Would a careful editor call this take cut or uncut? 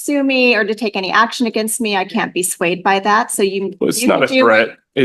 uncut